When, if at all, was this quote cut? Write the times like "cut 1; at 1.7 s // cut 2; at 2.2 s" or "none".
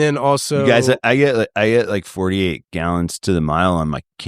none